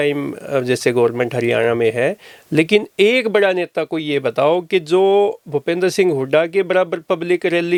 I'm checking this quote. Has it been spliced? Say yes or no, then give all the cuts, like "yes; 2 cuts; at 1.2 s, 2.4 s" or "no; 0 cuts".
no; 0 cuts